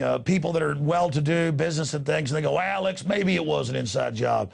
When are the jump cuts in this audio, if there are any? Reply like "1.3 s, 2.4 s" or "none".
3.5 s